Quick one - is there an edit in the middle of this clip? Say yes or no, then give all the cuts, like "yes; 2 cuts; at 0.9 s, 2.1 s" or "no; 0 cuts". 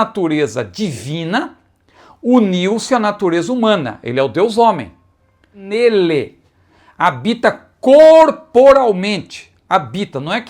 yes; 1 cut; at 5.6 s